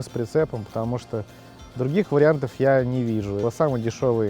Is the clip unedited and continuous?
no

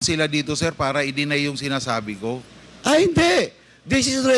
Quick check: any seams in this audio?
yes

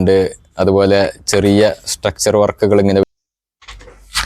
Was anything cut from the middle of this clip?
yes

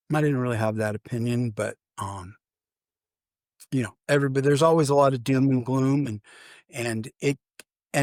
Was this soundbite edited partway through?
no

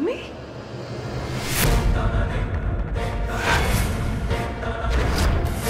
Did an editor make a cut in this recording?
no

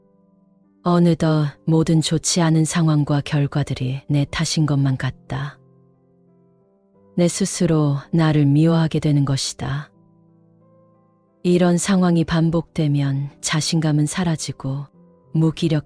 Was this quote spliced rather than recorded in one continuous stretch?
yes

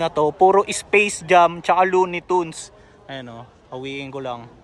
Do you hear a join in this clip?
no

